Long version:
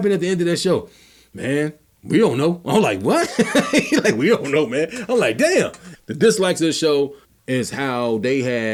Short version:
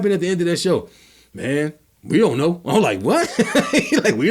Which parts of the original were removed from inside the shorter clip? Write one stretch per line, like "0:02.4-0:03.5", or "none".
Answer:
none